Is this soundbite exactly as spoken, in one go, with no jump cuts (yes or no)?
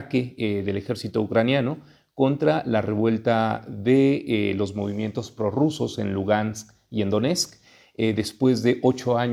yes